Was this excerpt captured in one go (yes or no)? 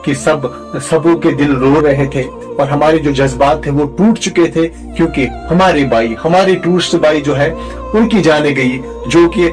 yes